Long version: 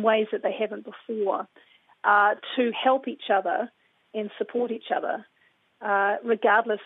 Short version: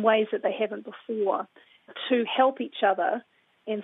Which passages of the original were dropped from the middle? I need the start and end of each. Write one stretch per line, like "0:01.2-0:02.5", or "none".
0:02.0-0:02.4